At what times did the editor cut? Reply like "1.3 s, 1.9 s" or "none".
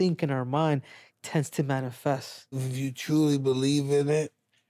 2.7 s